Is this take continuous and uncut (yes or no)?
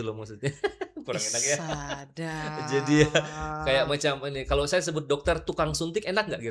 yes